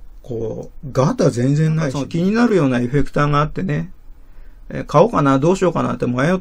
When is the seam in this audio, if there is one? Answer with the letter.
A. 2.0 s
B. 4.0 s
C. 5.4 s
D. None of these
A